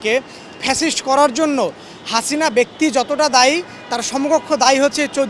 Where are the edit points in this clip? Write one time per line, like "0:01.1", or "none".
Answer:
none